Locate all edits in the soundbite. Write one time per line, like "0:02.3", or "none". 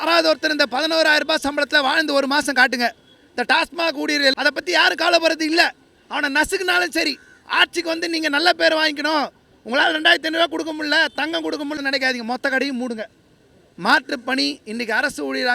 0:04.3
0:11.8